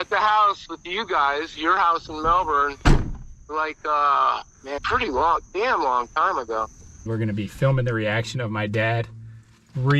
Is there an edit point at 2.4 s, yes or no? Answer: no